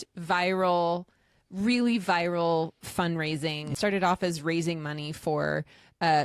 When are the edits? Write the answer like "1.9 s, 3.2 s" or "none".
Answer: 3.7 s